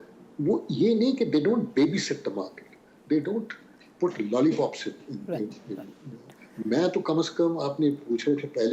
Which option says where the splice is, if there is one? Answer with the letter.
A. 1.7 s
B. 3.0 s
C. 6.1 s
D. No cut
D